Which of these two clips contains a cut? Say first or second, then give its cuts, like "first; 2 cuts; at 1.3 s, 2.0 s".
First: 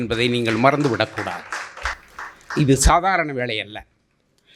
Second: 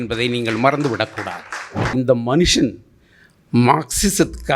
second; 1 cut; at 1.9 s